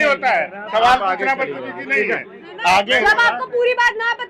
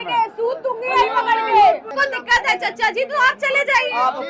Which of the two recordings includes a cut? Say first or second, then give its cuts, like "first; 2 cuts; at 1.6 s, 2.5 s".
second; 1 cut; at 1.9 s